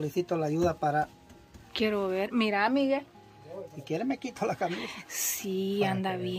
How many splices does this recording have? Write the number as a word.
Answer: zero